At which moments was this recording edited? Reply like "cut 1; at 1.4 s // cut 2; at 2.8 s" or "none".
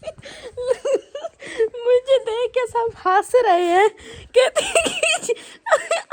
none